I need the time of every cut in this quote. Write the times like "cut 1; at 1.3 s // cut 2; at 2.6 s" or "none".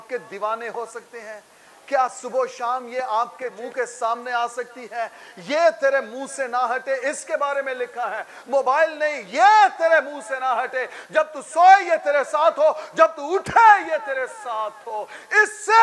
cut 1; at 3.5 s